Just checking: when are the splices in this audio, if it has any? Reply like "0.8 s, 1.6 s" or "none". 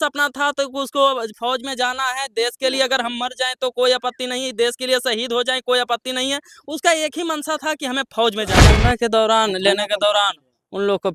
8.7 s